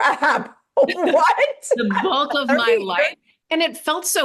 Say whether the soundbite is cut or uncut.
uncut